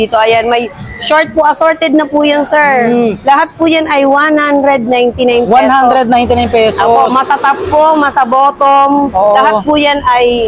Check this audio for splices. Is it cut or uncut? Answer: uncut